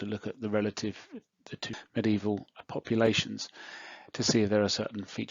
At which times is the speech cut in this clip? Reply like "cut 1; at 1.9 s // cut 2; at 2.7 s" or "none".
cut 1; at 1.7 s // cut 2; at 2.6 s

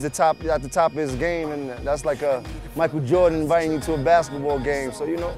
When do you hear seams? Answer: none

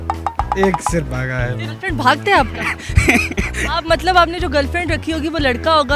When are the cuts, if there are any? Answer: cut 1; at 1.5 s

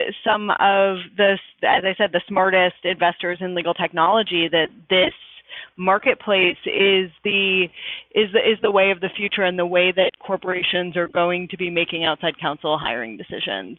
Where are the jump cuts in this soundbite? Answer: none

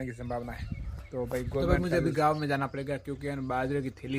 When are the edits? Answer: cut 1; at 1.6 s

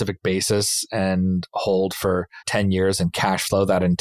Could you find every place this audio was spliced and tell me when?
cut 1; at 2.4 s

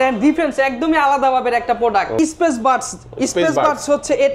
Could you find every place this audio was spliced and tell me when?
cut 1; at 2.2 s

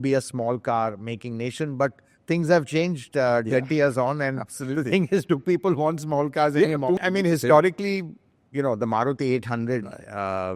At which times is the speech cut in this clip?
cut 1; at 7.0 s

